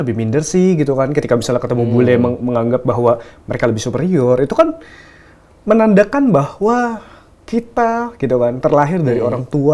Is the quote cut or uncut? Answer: uncut